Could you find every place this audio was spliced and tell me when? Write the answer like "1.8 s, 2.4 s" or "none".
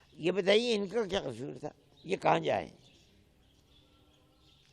none